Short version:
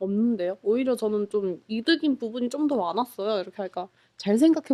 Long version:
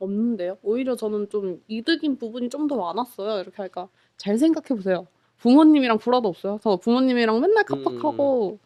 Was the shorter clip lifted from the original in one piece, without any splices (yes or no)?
yes